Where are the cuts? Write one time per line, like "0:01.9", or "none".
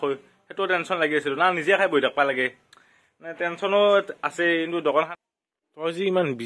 0:05.1